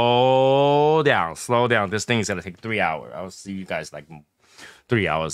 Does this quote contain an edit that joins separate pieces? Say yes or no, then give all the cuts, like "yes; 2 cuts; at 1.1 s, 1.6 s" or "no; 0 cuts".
no; 0 cuts